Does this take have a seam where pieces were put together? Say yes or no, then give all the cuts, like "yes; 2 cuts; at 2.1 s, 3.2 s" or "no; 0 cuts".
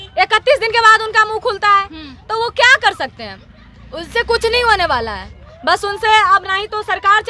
no; 0 cuts